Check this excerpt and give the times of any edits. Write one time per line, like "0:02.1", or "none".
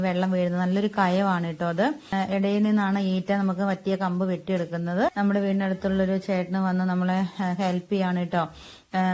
0:02.1
0:05.1